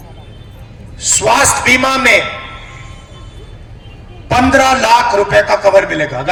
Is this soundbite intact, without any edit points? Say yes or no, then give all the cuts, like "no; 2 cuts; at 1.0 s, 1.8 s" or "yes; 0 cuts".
yes; 0 cuts